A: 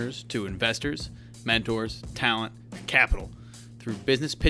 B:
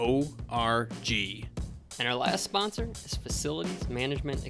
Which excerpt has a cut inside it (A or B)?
B